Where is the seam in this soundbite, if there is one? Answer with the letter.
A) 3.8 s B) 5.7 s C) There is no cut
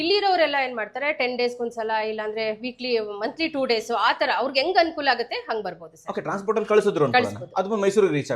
C